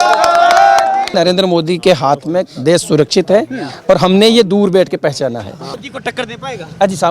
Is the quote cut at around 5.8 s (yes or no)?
yes